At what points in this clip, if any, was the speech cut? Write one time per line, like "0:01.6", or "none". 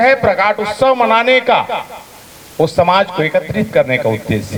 none